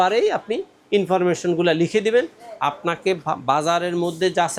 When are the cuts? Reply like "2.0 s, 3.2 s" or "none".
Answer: none